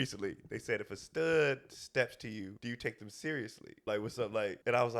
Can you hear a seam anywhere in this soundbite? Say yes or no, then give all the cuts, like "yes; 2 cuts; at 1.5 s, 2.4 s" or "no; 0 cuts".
yes; 2 cuts; at 2.5 s, 4.1 s